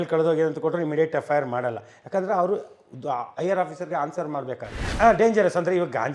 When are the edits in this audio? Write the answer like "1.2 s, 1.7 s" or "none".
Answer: 4.8 s

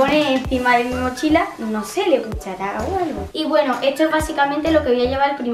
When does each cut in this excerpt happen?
3.3 s

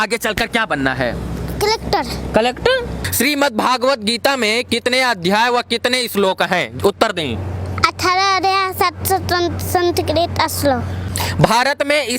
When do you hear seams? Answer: 3.0 s, 11.0 s

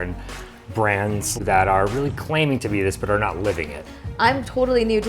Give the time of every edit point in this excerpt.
1.4 s, 4.0 s

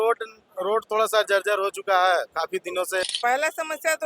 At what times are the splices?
3.1 s

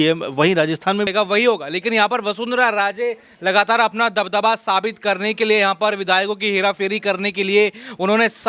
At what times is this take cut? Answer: 1.1 s

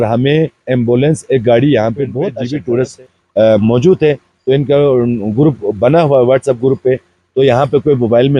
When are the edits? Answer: 2.3 s

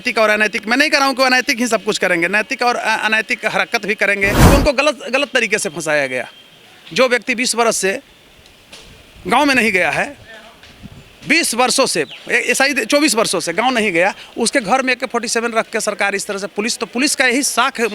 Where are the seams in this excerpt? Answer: 4.4 s

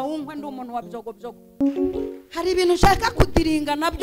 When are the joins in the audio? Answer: 1.4 s

